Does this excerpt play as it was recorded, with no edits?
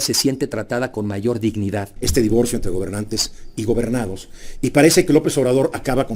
no; 1 cut; at 2.0 s

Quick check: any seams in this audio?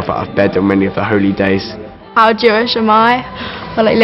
yes; 1 cut; at 1.8 s

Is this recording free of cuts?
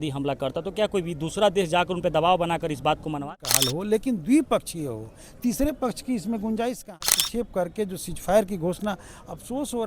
no; 2 cuts; at 3.2 s, 7.0 s

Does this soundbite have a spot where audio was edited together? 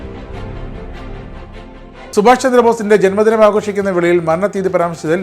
yes; 1 cut; at 2.1 s

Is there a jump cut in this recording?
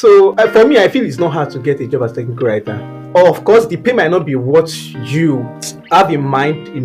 no; 0 cuts

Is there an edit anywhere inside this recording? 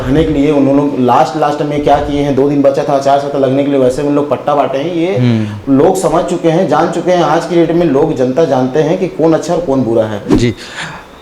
yes; 1 cut; at 10.3 s

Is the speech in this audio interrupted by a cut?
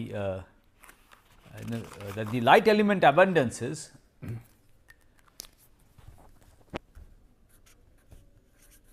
no; 0 cuts

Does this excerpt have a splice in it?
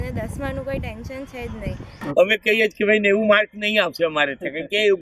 yes; 1 cut; at 1.9 s

